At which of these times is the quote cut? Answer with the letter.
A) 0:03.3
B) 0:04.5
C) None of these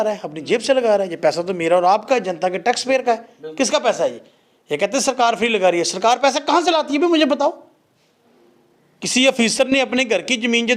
C